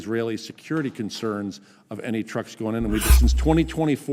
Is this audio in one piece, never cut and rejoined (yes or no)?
no